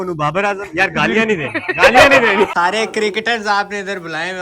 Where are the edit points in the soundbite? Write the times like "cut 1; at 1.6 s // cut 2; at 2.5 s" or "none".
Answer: cut 1; at 2.5 s